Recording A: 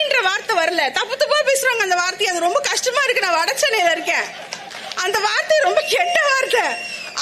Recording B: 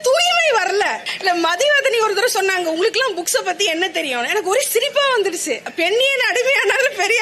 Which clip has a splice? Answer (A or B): B